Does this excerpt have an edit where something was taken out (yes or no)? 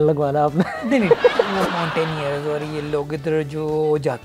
yes